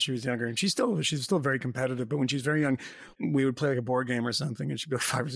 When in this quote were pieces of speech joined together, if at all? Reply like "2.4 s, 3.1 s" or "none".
3.1 s